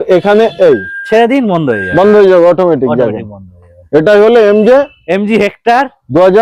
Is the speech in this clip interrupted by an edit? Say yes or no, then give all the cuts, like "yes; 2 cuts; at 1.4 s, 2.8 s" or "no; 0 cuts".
no; 0 cuts